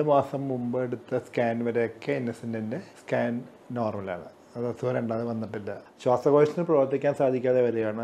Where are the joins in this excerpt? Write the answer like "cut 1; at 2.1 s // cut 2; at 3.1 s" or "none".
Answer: cut 1; at 2.9 s // cut 2; at 5.8 s